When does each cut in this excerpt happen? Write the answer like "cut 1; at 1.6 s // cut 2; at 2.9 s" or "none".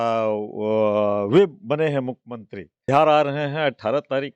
cut 1; at 2.7 s